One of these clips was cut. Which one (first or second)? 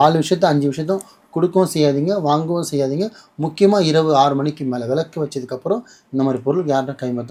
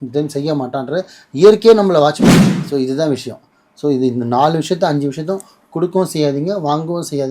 second